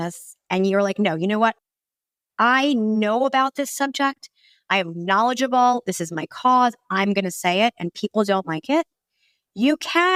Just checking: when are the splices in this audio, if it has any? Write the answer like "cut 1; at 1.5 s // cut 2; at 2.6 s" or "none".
none